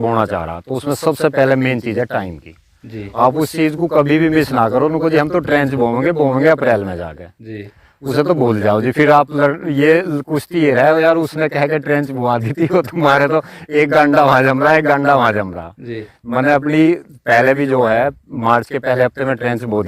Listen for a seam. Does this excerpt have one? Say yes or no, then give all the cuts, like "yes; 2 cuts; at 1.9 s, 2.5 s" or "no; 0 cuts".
no; 0 cuts